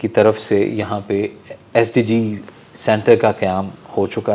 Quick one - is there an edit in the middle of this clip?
no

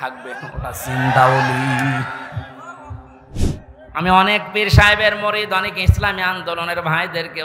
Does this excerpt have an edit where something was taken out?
yes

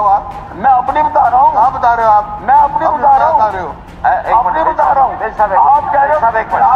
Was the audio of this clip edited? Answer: no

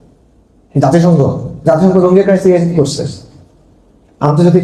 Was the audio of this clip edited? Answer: no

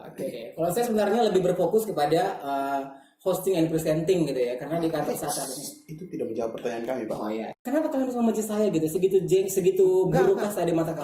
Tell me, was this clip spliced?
yes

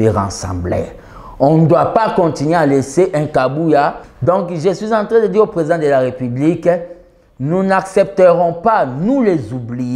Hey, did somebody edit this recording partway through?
yes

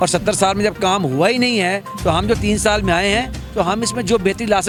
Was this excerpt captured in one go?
yes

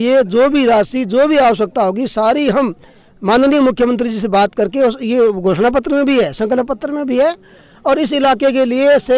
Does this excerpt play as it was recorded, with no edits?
yes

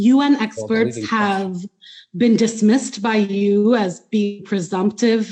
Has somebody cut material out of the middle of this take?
no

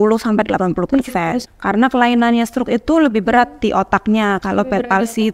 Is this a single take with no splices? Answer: no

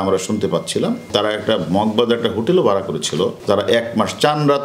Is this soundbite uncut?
no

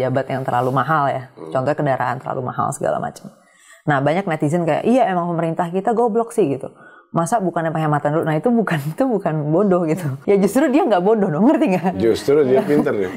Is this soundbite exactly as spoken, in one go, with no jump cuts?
no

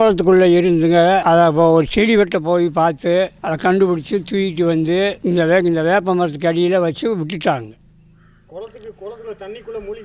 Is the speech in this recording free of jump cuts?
yes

